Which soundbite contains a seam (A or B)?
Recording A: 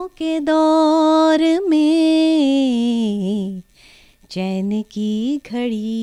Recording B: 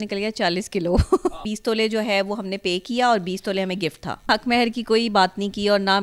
B